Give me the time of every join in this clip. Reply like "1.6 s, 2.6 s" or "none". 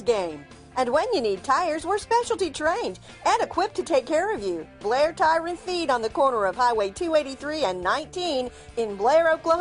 none